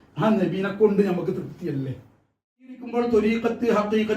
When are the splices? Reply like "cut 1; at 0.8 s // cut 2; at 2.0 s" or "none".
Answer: cut 1; at 2.9 s